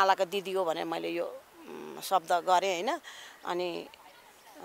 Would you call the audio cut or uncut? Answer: uncut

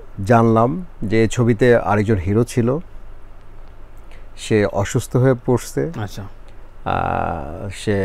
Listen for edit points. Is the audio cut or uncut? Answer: uncut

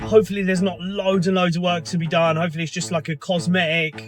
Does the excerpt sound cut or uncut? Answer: uncut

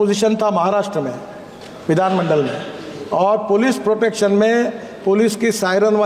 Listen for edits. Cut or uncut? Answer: uncut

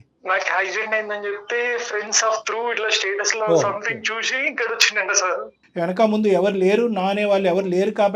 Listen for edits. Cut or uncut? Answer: uncut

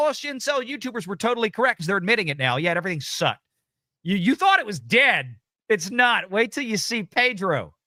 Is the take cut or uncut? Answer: uncut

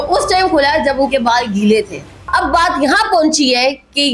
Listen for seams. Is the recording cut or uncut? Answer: cut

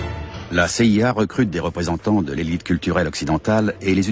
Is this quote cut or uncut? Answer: cut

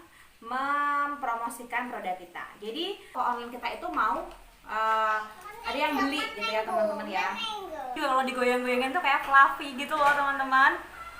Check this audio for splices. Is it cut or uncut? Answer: cut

